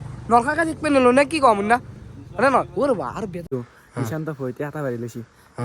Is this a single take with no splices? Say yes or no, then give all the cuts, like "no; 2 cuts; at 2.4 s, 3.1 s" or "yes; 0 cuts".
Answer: no; 1 cut; at 3.5 s